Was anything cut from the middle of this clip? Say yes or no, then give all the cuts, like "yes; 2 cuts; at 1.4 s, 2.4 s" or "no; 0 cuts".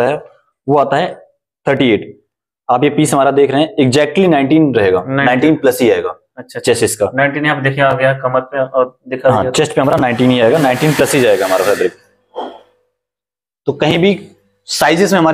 no; 0 cuts